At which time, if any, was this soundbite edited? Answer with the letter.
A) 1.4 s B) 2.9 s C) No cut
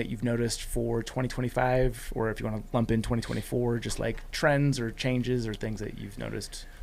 C